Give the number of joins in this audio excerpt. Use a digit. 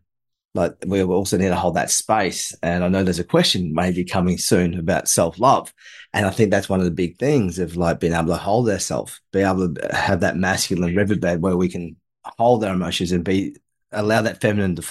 1